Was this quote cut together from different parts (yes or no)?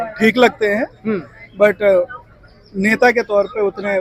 no